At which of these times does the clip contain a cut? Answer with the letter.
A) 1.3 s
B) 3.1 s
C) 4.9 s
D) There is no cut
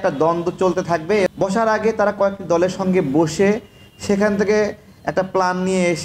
A